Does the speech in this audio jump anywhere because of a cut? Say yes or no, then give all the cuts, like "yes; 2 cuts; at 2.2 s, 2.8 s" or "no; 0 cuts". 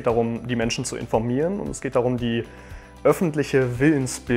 no; 0 cuts